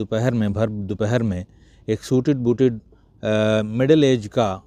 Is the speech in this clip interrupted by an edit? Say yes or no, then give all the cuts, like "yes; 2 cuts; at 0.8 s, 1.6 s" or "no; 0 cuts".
no; 0 cuts